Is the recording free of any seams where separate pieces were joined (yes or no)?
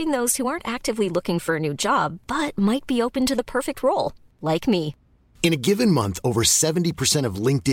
yes